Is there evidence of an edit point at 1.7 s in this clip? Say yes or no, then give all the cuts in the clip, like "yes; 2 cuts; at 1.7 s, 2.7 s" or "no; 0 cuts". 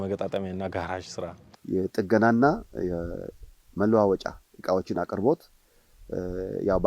yes; 1 cut; at 1.7 s